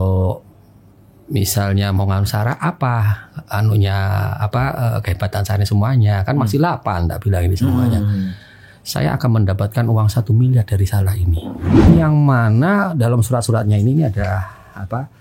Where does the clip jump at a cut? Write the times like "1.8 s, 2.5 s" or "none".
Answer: 11.8 s